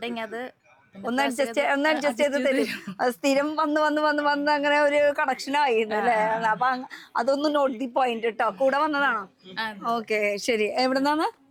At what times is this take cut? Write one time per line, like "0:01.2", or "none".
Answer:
none